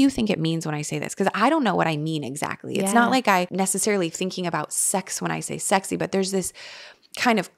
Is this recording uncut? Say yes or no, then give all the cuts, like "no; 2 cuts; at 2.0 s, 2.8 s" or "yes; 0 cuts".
no; 1 cut; at 3.5 s